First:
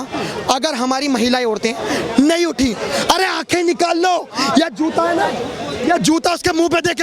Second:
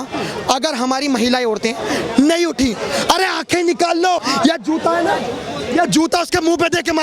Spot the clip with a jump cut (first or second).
second